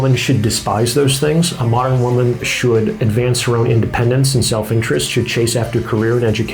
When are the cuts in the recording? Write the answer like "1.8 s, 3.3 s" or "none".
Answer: none